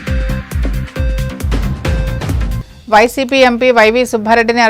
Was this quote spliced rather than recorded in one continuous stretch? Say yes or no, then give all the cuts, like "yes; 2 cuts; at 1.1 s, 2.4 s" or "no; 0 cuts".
yes; 1 cut; at 2.3 s